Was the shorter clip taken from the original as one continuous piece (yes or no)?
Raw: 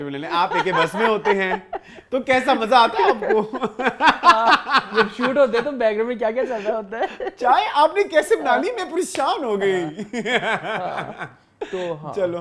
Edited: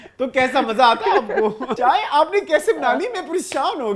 no